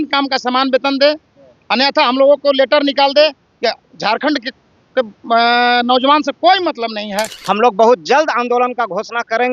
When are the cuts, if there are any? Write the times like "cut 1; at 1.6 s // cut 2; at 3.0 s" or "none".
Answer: cut 1; at 7.3 s